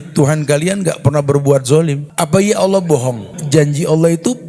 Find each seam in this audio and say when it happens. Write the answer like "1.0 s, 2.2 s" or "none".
2.0 s, 3.3 s